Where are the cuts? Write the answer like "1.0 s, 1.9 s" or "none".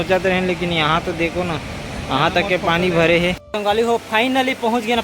3.4 s